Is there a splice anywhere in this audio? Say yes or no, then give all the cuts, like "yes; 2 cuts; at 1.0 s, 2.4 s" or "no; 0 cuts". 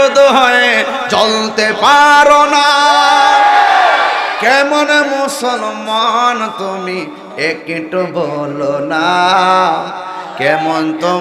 no; 0 cuts